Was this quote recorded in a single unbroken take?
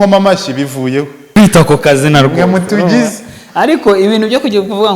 no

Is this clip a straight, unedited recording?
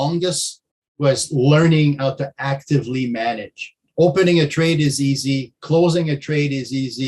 no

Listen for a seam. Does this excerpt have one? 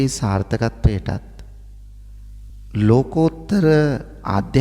no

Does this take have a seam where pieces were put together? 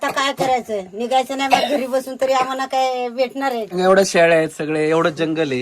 yes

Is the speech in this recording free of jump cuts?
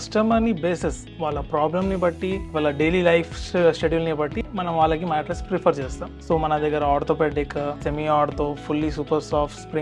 no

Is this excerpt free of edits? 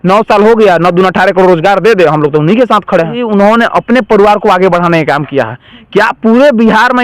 no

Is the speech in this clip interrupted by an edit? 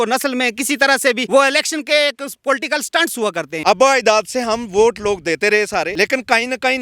yes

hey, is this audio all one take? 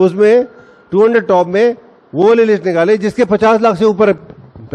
yes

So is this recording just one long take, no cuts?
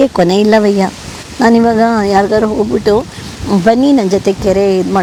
yes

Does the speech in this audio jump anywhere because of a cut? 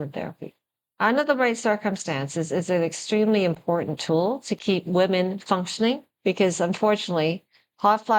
yes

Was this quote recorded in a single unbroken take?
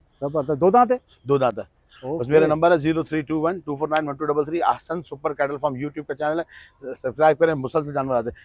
yes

